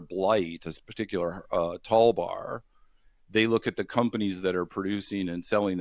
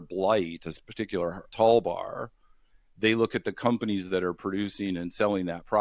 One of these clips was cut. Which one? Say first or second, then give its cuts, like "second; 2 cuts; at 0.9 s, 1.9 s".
second; 1 cut; at 1.4 s